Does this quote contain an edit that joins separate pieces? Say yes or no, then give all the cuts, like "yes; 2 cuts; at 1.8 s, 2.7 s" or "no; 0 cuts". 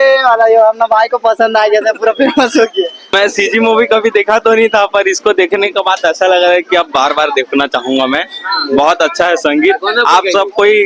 no; 0 cuts